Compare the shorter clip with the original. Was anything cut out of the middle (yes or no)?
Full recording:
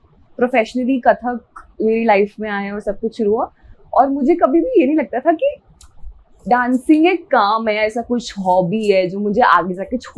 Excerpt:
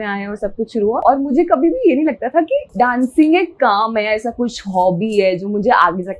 yes